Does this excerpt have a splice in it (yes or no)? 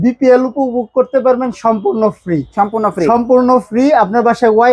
no